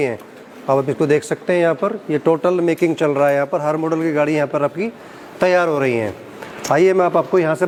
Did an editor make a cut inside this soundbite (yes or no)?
no